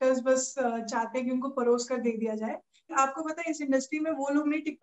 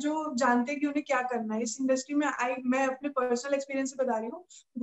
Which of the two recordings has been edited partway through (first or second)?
first